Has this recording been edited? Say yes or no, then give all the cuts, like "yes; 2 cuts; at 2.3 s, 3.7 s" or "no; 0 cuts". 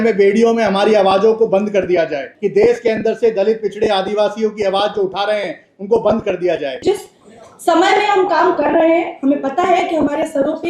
yes; 2 cuts; at 2.3 s, 6.8 s